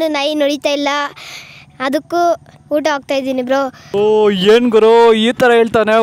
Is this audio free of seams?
no; 1 cut; at 3.9 s

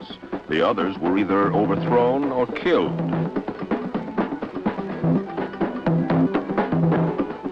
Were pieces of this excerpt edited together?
yes; 1 cut; at 1.2 s

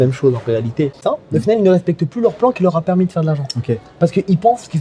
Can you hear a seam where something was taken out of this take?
yes; 1 cut; at 1.0 s

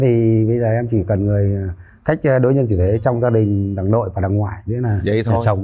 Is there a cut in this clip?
no; 0 cuts

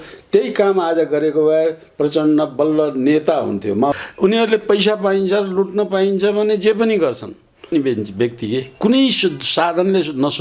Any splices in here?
yes; 2 cuts; at 3.9 s, 7.7 s

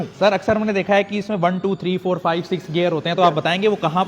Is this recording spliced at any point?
no; 0 cuts

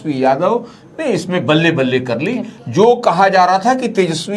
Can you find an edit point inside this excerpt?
no; 0 cuts

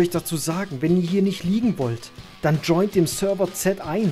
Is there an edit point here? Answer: no; 0 cuts

